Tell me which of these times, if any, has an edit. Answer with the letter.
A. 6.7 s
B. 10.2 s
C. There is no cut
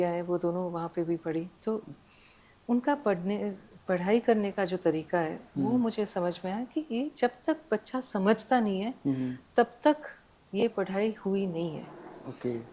C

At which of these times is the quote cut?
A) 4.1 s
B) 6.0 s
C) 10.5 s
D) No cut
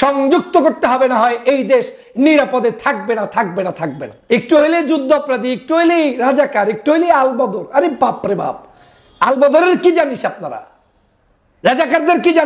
A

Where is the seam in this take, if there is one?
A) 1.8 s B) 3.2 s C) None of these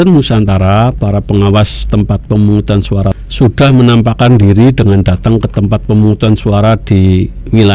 B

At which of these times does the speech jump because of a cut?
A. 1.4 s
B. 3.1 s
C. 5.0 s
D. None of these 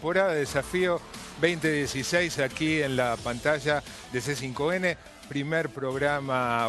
D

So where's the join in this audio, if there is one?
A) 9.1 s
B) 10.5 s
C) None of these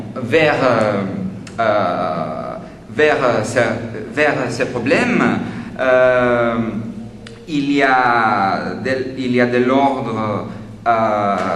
B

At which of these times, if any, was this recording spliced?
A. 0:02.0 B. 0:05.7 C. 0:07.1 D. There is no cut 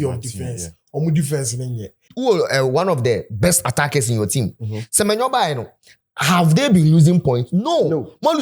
A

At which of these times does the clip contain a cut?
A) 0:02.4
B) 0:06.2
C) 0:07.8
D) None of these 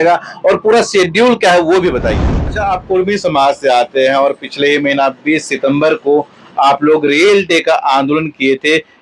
A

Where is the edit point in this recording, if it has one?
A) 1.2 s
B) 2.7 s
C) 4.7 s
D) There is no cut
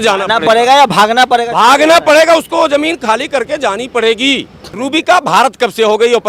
C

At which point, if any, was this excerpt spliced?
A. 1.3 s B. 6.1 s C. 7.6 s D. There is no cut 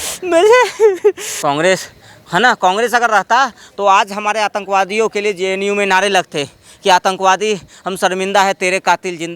A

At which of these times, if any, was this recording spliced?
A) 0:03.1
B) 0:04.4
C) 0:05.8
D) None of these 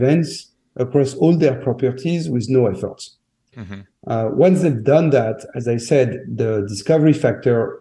D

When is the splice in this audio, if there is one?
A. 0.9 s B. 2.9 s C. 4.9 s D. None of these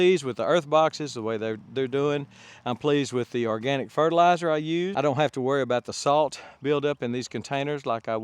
C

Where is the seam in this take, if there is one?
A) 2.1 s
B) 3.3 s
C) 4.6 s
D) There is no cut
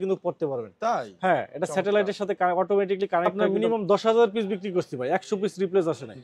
B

